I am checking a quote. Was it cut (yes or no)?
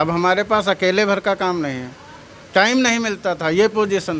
no